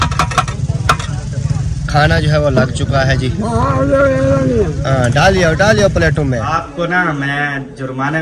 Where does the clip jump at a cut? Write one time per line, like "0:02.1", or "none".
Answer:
0:06.5